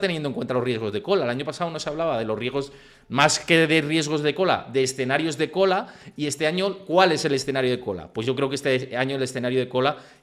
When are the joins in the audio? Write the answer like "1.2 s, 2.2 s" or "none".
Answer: none

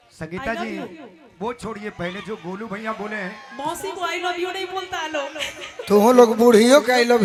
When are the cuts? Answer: none

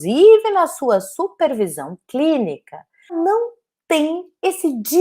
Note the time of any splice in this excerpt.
3.1 s

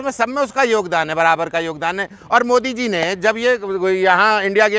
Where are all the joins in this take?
none

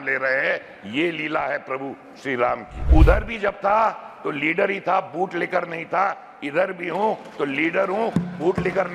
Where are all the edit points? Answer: 2.8 s

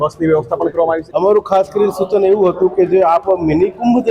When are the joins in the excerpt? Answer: 1.0 s

